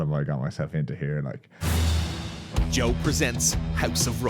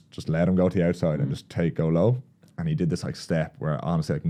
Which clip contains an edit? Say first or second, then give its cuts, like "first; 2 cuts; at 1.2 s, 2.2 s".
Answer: first; 1 cut; at 1.5 s